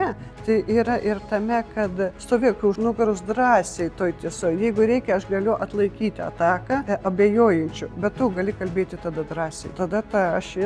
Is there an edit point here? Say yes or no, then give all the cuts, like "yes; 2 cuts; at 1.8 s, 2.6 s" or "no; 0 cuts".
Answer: yes; 3 cuts; at 2.6 s, 6.8 s, 9.6 s